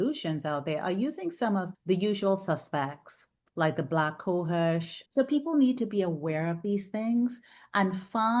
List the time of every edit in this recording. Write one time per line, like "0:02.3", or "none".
0:05.0